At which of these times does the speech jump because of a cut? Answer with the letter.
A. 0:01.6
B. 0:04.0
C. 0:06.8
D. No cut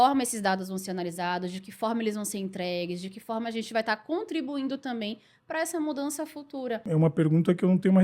C